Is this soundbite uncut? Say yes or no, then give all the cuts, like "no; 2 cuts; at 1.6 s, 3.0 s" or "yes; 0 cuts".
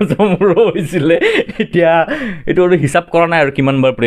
yes; 0 cuts